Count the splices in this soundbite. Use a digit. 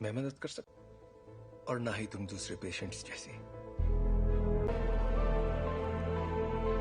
1